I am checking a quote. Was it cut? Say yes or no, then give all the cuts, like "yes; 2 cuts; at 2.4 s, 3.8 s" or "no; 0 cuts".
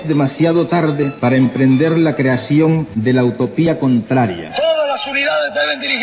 yes; 3 cuts; at 1.1 s, 2.9 s, 4.4 s